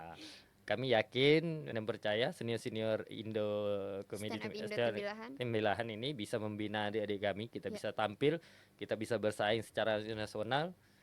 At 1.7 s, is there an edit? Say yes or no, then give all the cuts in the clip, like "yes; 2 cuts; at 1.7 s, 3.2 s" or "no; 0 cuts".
yes; 1 cut; at 1.7 s